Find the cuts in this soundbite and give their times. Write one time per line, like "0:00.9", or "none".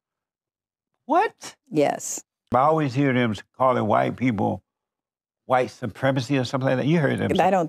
0:02.5

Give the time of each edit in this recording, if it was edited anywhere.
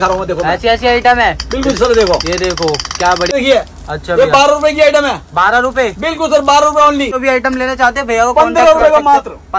0:03.3
0:07.2

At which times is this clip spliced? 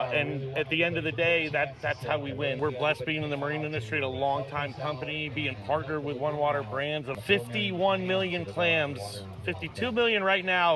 0:02.6
0:07.1

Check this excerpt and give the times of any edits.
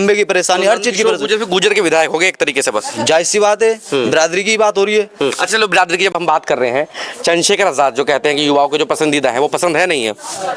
none

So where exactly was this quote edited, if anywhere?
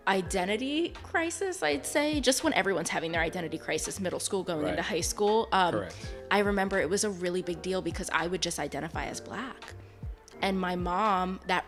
none

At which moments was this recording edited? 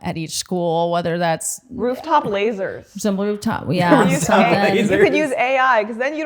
none

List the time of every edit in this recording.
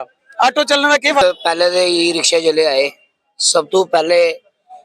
0:01.2

